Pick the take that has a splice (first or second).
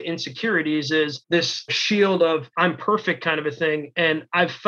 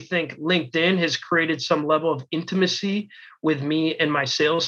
first